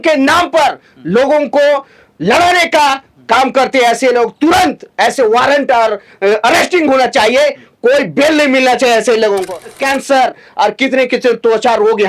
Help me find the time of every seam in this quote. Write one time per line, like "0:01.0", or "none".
0:09.7